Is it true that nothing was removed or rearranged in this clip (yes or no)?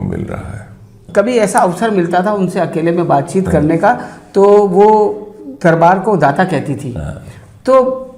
no